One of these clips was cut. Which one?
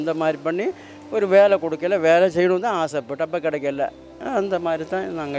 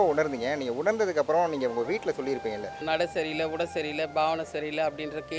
second; 1 cut; at 2.7 s

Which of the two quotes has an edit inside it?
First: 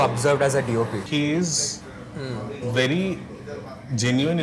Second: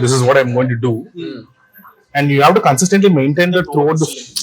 first; 1 cut; at 1.1 s

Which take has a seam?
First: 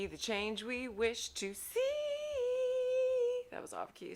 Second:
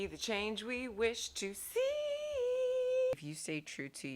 second; 1 cut; at 3.1 s

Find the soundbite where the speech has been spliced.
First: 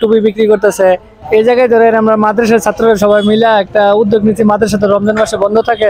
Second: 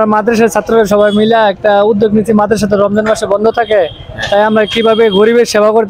first; 1 cut; at 1.1 s

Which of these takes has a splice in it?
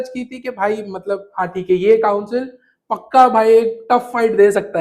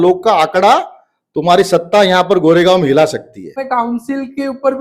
second; 1 cut; at 3.6 s

